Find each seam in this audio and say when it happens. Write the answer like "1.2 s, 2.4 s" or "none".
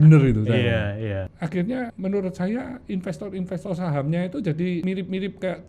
1.1 s, 1.9 s, 4.8 s